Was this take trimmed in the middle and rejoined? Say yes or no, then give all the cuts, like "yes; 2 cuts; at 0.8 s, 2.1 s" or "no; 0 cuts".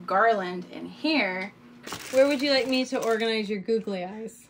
yes; 1 cut; at 1.6 s